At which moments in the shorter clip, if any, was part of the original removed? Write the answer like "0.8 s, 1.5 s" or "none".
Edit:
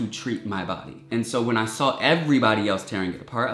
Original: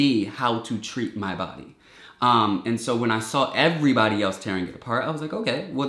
1.1 s